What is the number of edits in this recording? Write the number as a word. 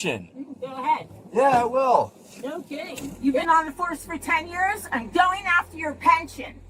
one